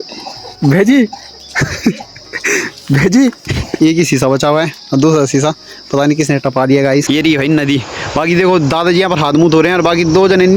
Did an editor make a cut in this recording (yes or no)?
yes